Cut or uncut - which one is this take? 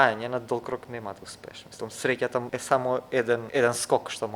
cut